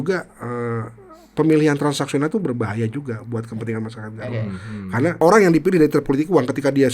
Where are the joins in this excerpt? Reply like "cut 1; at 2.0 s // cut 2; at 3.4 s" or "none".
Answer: cut 1; at 5.2 s